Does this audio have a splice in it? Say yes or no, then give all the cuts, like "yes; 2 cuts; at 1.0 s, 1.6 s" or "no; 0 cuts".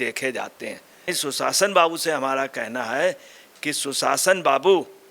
yes; 1 cut; at 1.1 s